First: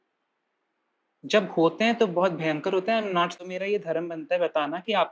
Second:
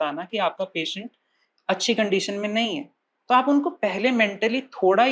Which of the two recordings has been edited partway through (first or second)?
first